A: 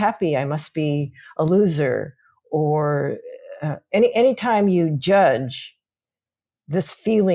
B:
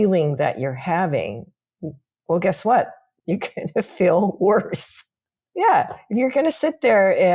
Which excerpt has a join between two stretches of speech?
B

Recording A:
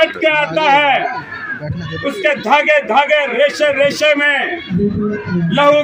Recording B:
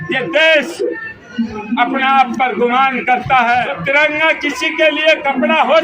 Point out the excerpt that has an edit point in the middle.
B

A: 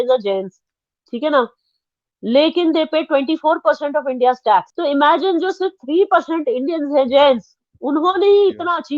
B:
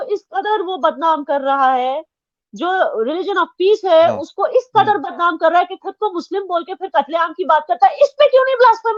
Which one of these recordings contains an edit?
A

